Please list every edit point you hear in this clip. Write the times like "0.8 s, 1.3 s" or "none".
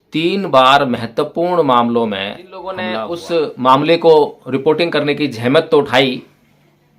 2.9 s